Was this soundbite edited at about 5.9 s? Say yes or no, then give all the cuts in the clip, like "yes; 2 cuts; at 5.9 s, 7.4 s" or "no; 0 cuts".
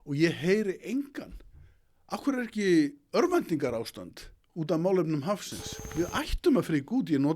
yes; 1 cut; at 5.9 s